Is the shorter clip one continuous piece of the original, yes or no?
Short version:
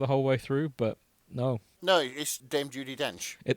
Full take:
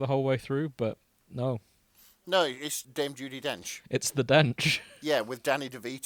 no